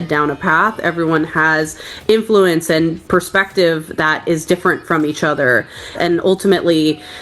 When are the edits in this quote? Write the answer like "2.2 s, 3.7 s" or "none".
5.9 s